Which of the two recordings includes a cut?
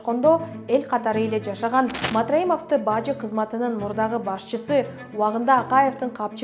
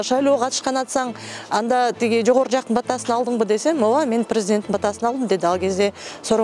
first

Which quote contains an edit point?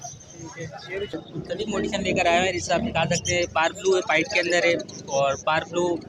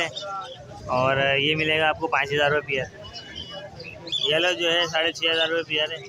first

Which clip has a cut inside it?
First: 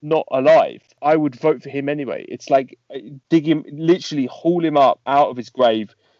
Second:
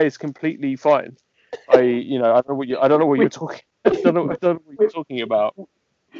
first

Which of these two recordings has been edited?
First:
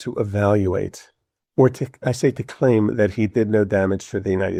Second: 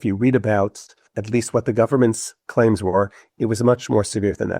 second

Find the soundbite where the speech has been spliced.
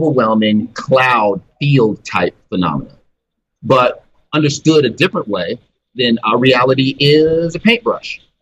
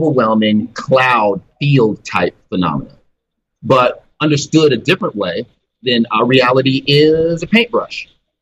second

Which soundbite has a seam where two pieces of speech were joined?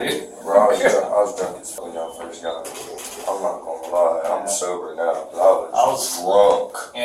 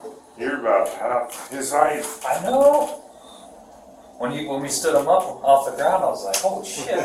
first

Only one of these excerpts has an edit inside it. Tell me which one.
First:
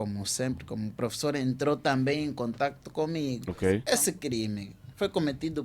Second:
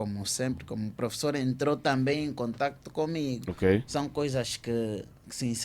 first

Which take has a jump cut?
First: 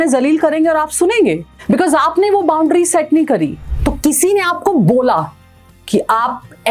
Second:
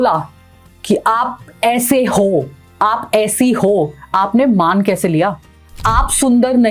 first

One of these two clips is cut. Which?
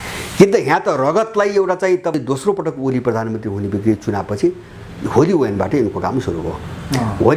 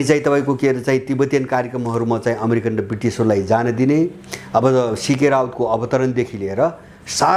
first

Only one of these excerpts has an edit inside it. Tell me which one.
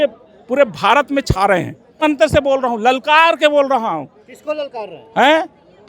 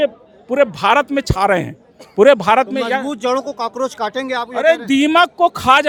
first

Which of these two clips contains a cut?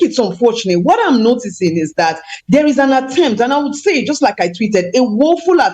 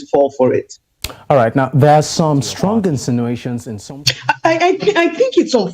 second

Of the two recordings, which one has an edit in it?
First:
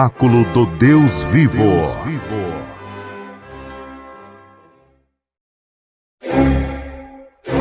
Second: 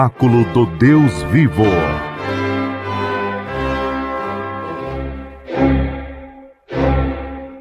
second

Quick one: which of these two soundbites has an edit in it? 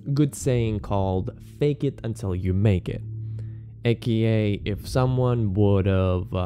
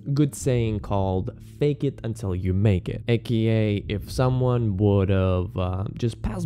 second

